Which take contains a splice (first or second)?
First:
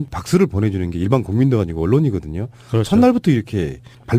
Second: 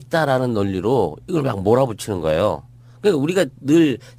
first